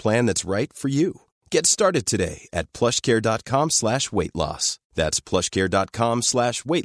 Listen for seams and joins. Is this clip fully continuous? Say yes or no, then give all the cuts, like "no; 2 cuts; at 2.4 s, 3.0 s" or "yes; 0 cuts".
yes; 0 cuts